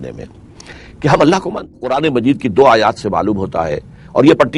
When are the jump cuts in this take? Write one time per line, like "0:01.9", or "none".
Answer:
0:01.9